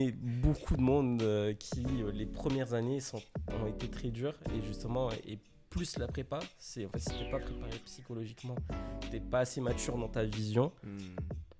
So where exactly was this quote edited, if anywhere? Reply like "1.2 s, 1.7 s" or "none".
none

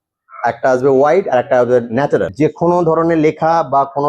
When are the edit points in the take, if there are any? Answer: 2.3 s

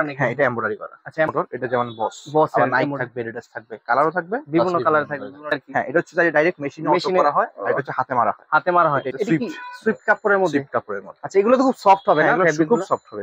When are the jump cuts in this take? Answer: 1.3 s, 5.5 s, 9.1 s

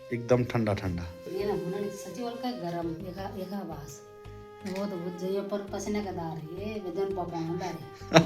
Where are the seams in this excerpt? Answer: 1.2 s

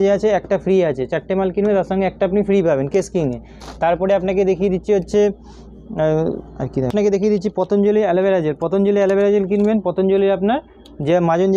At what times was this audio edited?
none

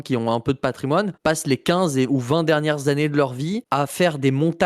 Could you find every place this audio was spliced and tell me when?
1.1 s, 3.6 s

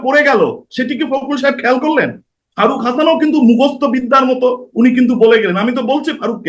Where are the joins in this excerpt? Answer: 2.4 s

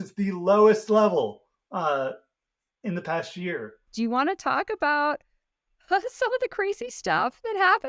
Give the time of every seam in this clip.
3.8 s

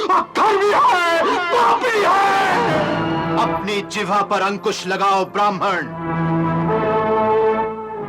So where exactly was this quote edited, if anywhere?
none

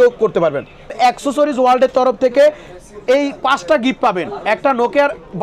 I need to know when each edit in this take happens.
1.0 s

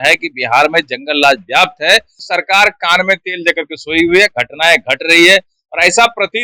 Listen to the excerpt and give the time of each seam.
2.2 s

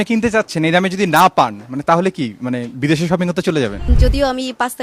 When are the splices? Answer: 3.8 s

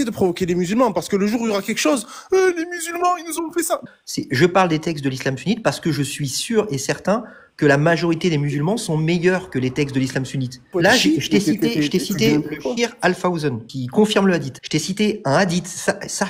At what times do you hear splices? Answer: 3.8 s, 10.7 s, 13.7 s, 14.6 s

